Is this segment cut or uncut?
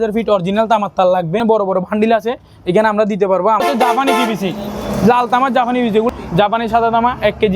cut